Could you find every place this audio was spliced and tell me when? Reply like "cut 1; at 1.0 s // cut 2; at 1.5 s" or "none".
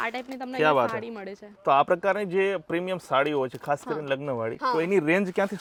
none